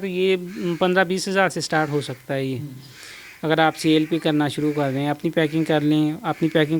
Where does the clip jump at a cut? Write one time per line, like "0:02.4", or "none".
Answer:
none